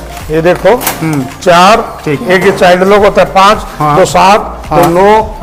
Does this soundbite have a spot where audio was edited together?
no; 0 cuts

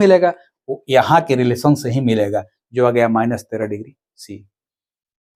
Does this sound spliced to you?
no; 0 cuts

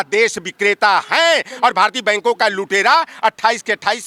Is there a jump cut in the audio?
no; 0 cuts

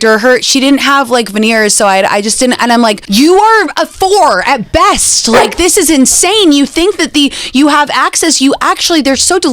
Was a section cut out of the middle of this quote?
yes; 1 cut; at 3.0 s

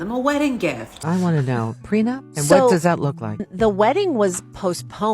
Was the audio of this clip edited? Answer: yes; 2 cuts; at 1.0 s, 3.5 s

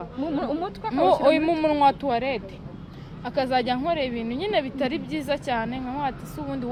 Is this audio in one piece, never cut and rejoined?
yes; 0 cuts

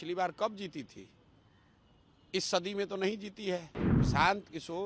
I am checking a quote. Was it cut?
yes; 1 cut; at 3.8 s

